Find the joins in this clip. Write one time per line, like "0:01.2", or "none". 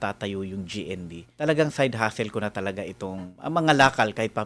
0:01.2
0:03.3